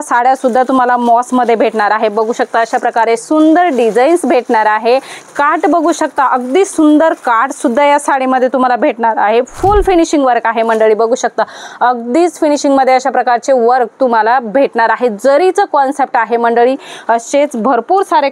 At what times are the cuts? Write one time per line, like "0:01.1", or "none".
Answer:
none